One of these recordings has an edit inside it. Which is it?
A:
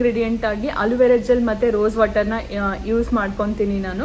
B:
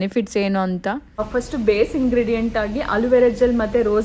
B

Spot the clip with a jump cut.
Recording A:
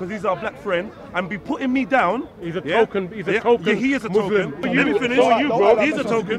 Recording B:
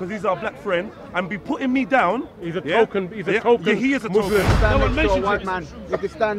B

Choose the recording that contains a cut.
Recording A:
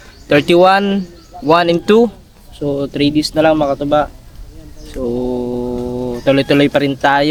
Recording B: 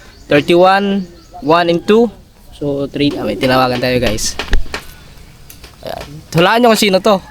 B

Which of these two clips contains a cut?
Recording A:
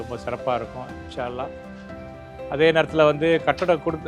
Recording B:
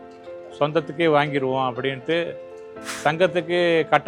B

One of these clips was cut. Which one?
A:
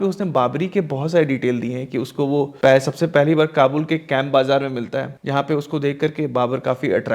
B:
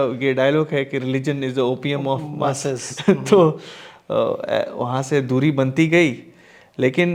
A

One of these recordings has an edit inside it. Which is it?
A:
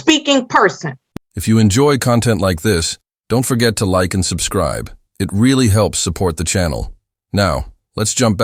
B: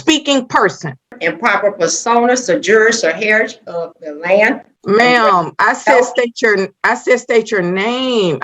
B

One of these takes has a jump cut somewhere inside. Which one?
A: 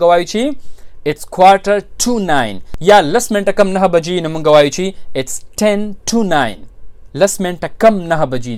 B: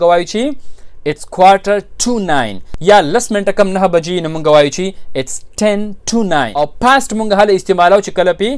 B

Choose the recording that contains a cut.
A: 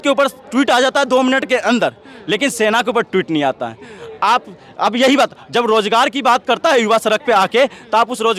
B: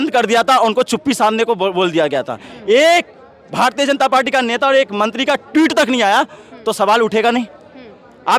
B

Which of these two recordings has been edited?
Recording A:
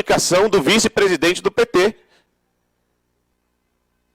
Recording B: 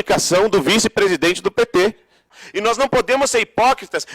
B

